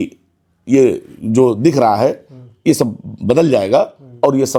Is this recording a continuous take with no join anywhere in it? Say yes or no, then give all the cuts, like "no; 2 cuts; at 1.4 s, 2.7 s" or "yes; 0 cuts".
yes; 0 cuts